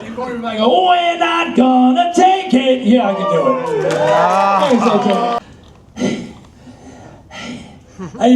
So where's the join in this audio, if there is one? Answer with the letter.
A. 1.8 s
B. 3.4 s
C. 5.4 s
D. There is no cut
C